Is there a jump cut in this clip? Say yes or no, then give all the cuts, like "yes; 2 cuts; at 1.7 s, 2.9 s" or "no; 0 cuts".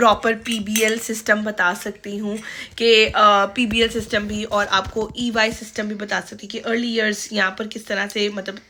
no; 0 cuts